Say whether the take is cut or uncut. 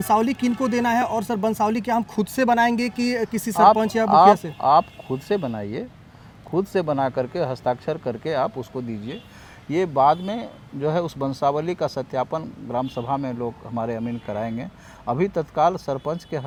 uncut